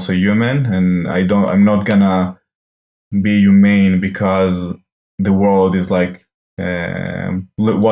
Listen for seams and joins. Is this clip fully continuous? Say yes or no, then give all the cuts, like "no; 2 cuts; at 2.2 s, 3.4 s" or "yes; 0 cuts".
yes; 0 cuts